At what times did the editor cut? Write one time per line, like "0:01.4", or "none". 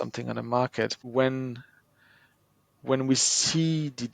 0:01.0